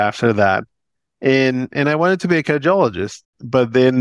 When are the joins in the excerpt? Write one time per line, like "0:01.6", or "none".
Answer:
none